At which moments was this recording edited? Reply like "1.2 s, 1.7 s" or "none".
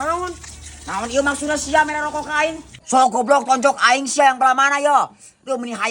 2.7 s